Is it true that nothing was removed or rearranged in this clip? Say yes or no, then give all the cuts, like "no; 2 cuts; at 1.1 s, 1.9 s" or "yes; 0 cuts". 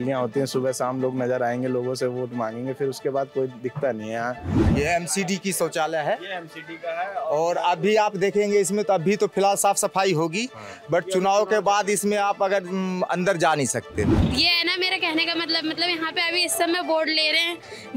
no; 2 cuts; at 4.6 s, 14.2 s